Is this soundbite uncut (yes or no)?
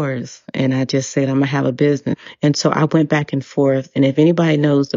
no